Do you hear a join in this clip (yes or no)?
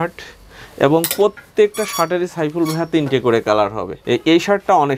yes